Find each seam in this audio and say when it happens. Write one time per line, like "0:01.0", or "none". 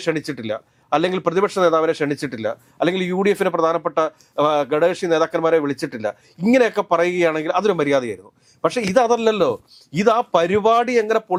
none